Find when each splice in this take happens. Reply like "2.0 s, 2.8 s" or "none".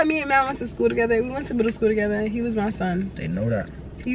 none